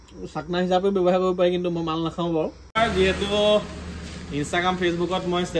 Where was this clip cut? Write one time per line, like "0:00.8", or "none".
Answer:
0:02.8